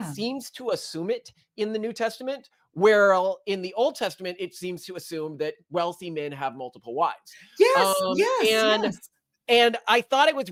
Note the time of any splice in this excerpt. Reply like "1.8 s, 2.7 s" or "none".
none